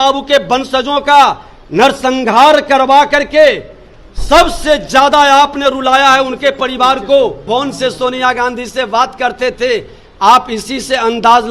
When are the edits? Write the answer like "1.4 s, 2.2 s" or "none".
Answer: 7.4 s